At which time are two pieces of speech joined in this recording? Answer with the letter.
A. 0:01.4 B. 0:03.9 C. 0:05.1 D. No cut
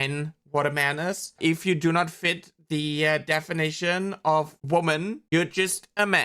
A